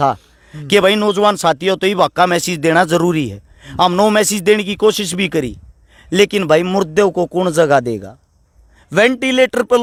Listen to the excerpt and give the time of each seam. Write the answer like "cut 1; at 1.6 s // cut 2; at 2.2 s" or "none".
none

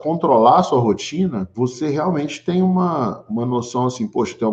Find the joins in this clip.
cut 1; at 1.5 s

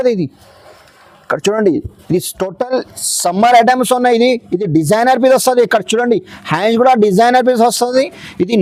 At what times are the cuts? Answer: none

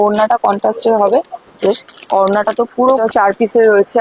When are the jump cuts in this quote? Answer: cut 1; at 2.9 s

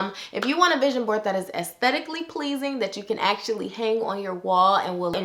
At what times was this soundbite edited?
none

